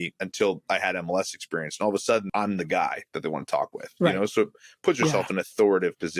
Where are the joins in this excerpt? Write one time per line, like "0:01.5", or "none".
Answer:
0:02.3